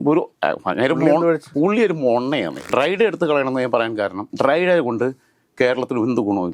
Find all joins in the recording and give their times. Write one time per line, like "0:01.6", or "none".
0:01.5
0:02.7